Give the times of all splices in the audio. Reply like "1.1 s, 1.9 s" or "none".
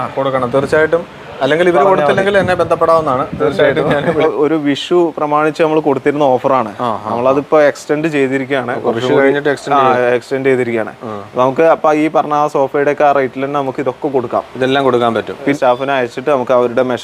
4.2 s, 15.5 s